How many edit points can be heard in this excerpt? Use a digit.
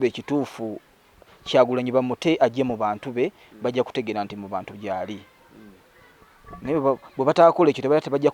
0